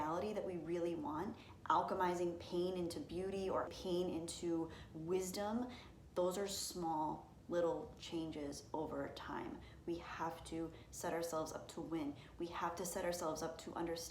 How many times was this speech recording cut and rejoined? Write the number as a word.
one